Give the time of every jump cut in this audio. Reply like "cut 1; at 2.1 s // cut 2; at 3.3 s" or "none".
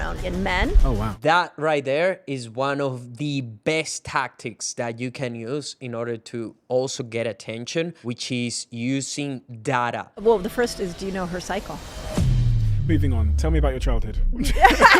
cut 1; at 1.1 s // cut 2; at 8.0 s // cut 3; at 10.1 s